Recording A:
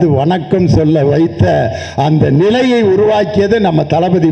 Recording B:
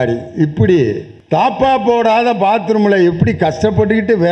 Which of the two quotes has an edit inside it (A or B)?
B